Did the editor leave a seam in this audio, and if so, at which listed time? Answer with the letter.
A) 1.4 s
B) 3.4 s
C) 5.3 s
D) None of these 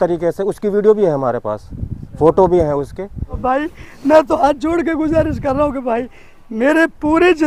B